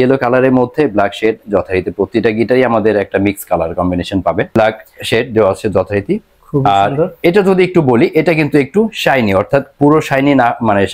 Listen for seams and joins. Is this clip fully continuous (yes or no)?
no